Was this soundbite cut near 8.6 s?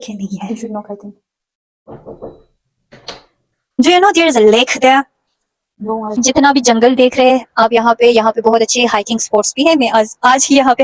no; 2 cuts; at 3.8 s, 6.2 s

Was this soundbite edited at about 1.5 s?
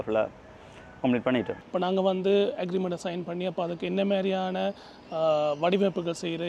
yes; 1 cut; at 1.5 s

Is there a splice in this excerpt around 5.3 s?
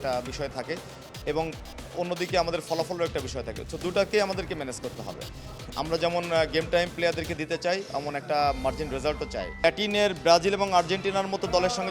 no; 1 cut; at 9.6 s

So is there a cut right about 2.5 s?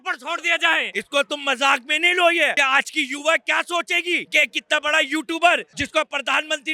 yes; 4 cuts; at 0.9 s, 2.5 s, 4.3 s, 5.8 s

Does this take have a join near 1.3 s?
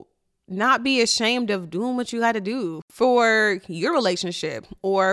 no; 1 cut; at 2.8 s

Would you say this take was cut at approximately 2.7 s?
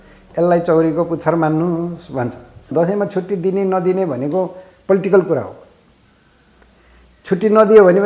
yes; 1 cut; at 2.7 s

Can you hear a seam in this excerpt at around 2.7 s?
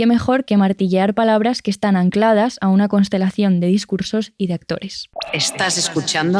no; 1 cut; at 5.0 s

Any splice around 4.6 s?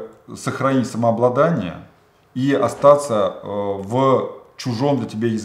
no; 0 cuts

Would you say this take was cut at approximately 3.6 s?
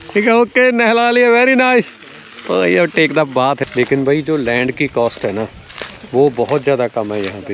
yes; 1 cut; at 3.6 s

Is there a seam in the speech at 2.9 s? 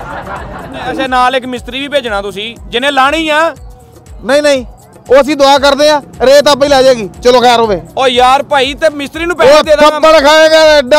no; 1 cut; at 1.0 s

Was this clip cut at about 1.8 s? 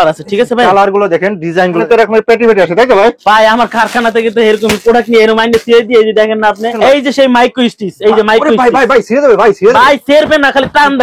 yes; 2 cuts; at 1.8 s, 6.7 s

